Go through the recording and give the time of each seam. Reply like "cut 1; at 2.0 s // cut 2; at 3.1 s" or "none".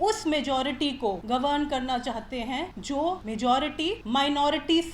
cut 1; at 1.2 s // cut 2; at 3.0 s // cut 3; at 4.0 s